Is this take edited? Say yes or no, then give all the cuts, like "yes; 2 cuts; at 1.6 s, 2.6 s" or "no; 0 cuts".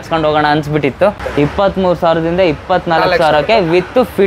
yes; 1 cut; at 1.2 s